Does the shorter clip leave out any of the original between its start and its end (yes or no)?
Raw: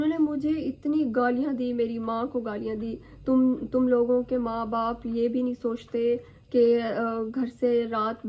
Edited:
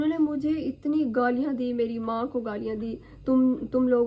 no